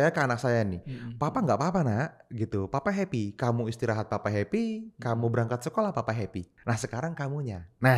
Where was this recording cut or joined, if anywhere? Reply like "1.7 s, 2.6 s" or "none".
6.5 s